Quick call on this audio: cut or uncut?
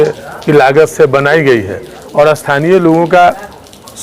cut